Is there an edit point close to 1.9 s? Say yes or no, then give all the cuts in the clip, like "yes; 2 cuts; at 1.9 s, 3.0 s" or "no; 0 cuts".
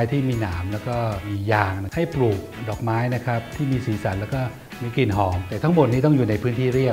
yes; 1 cut; at 1.9 s